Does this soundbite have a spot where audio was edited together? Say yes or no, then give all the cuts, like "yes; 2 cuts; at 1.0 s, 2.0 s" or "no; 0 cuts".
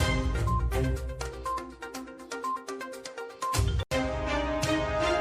yes; 1 cut; at 3.7 s